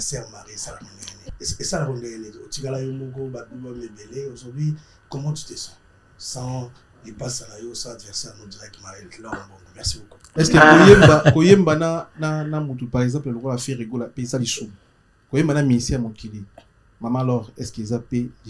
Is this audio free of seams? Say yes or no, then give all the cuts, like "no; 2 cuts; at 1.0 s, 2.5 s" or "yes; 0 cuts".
no; 2 cuts; at 1.2 s, 10.3 s